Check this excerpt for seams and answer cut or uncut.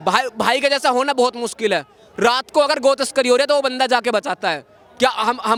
uncut